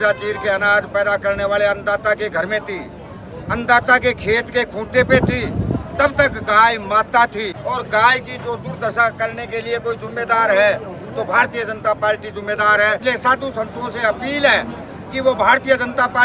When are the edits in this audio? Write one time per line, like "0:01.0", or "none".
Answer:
0:07.5
0:13.0